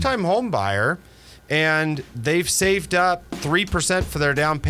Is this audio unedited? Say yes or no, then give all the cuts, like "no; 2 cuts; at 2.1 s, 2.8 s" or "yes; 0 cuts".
yes; 0 cuts